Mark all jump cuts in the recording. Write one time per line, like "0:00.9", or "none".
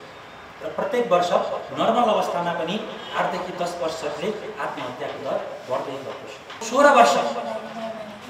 0:06.6